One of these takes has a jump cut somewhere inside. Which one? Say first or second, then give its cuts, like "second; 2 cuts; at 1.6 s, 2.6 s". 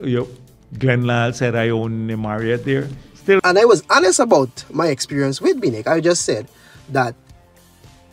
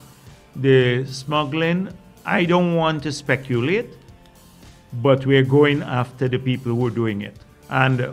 first; 1 cut; at 3.4 s